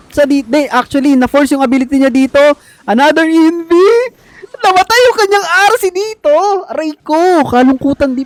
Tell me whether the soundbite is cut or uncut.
uncut